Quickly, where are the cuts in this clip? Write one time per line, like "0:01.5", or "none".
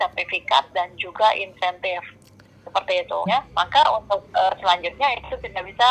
0:03.3